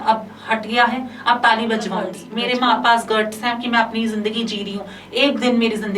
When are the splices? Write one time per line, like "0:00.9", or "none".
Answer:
0:02.2